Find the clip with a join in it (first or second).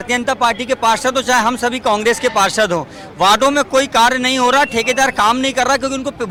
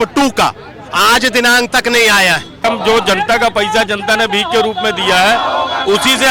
second